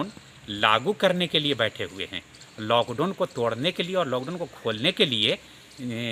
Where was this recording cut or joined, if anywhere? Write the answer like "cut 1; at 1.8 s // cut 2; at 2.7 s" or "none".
none